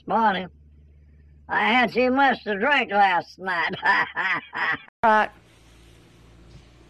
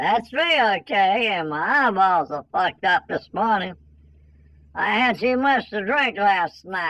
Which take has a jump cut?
first; 1 cut; at 4.8 s

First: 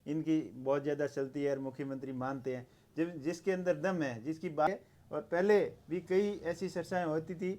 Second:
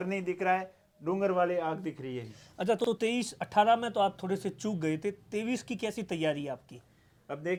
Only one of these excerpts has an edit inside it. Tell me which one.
first; 1 cut; at 4.7 s

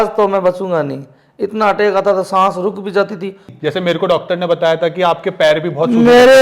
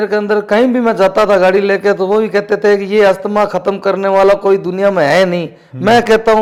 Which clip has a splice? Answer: first; 1 cut; at 3.5 s

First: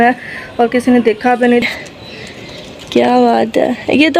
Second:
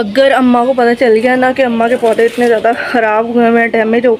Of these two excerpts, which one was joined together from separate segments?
first; 1 cut; at 1.6 s

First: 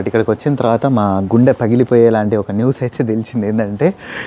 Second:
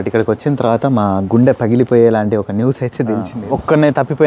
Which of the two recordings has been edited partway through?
second; 1 cut; at 3.3 s

